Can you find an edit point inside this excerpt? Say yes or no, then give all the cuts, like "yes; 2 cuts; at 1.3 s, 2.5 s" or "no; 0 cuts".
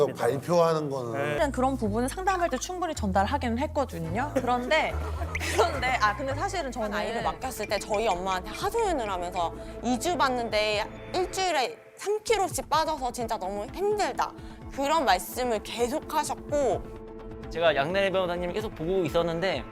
yes; 2 cuts; at 1.4 s, 7.1 s